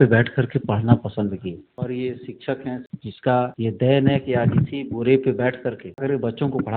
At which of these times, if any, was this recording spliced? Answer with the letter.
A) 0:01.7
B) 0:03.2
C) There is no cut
A